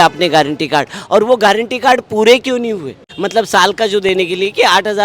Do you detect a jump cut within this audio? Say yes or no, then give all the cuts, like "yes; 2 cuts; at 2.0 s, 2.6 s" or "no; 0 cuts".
yes; 1 cut; at 3.1 s